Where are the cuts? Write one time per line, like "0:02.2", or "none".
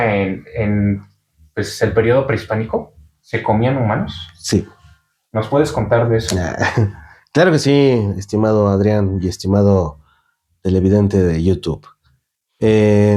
none